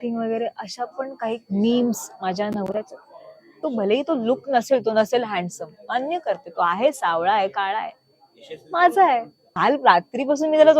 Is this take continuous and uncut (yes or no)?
no